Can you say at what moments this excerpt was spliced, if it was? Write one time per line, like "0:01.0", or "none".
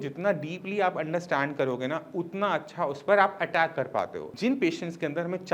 0:04.2